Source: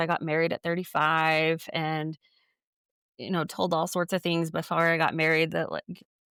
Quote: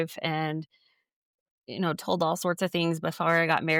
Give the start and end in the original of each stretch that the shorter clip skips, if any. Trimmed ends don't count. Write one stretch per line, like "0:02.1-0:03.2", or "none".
none